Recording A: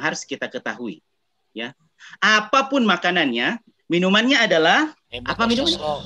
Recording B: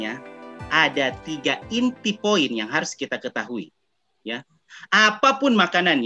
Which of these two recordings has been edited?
A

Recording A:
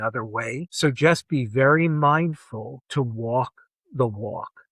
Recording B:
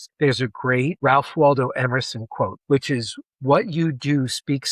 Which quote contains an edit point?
B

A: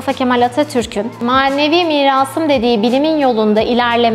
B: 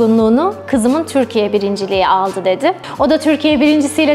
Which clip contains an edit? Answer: B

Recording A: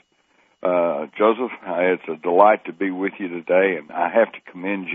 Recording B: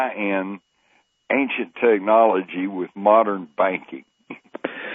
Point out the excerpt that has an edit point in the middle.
A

